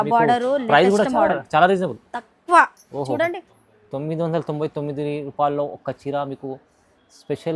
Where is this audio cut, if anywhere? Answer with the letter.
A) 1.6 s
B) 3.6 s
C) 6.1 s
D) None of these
B